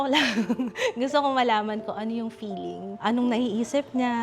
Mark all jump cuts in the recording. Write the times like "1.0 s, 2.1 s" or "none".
3.0 s